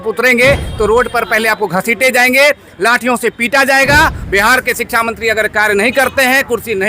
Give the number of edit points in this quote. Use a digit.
1